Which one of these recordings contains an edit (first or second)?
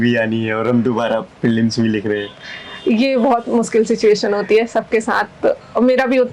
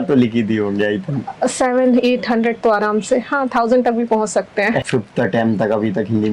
second